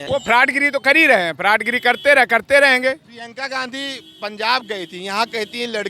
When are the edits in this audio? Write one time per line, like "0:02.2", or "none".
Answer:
none